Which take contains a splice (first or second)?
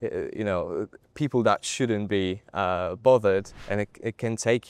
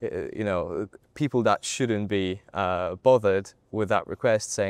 first